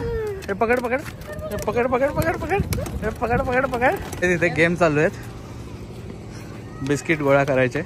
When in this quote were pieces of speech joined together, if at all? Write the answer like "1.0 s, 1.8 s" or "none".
4.1 s